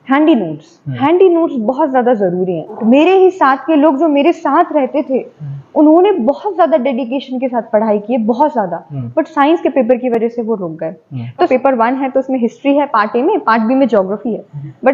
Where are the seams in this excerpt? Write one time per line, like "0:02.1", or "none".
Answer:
0:02.8
0:11.3